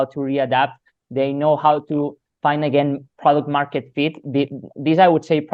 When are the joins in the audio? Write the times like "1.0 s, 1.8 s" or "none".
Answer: none